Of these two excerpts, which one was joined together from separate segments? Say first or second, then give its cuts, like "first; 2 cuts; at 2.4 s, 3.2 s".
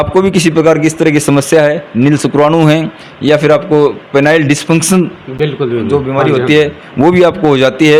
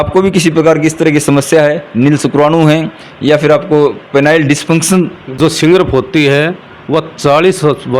second; 1 cut; at 5.4 s